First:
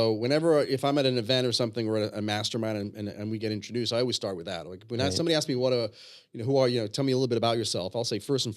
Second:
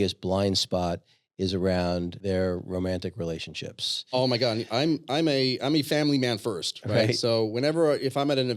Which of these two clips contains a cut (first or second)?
second